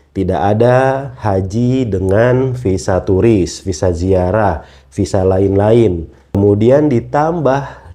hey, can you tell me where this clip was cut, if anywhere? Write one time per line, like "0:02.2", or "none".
0:06.4